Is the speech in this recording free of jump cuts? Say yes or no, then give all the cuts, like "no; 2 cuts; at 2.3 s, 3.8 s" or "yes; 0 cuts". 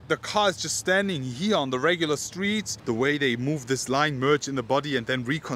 no; 1 cut; at 2.7 s